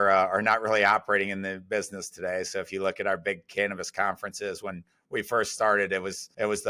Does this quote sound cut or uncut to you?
uncut